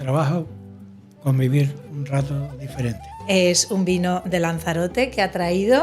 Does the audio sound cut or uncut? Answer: cut